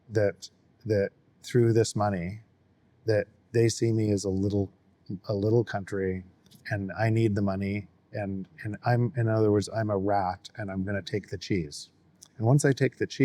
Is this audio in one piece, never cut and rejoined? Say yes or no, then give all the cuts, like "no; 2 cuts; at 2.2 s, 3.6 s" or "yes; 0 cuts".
yes; 0 cuts